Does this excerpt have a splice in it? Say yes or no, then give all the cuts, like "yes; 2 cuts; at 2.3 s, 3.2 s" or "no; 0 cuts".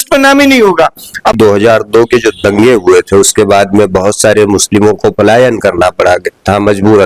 yes; 1 cut; at 1.4 s